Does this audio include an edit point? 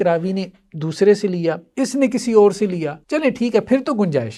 yes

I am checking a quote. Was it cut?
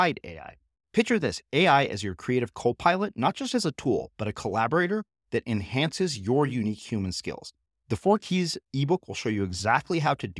no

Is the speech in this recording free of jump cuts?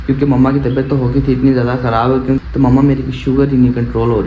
no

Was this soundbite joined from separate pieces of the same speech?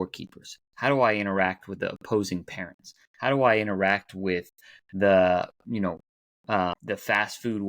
yes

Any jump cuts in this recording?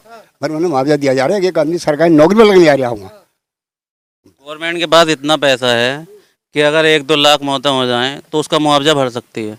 no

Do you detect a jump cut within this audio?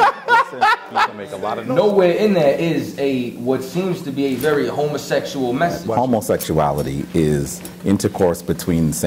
yes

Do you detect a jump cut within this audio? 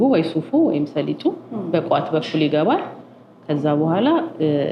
no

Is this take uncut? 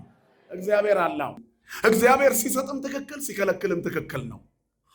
no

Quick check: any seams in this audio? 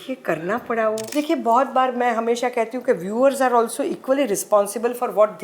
yes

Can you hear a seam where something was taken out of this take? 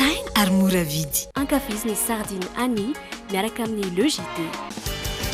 no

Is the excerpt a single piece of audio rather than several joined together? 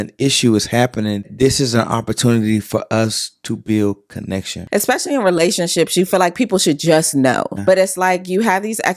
no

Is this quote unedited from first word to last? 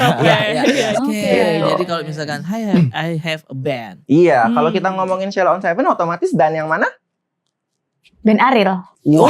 no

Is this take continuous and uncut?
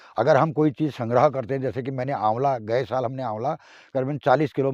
yes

